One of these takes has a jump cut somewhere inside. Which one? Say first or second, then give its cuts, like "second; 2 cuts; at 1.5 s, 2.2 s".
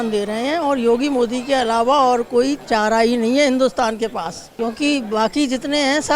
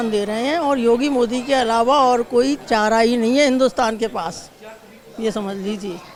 first; 1 cut; at 4.4 s